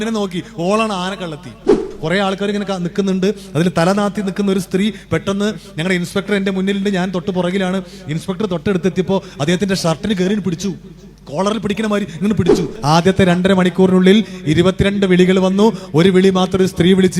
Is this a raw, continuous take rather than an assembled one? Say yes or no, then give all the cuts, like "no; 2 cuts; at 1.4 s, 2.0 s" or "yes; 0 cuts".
no; 2 cuts; at 1.7 s, 12.7 s